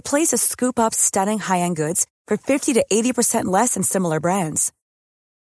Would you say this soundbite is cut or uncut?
uncut